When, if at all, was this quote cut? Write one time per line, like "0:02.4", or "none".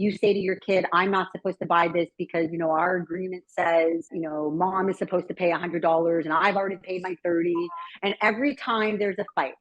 0:04.2